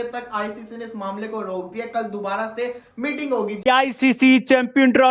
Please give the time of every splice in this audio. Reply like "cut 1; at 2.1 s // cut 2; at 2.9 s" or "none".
cut 1; at 3.6 s